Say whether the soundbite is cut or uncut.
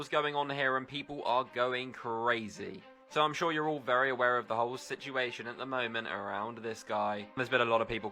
uncut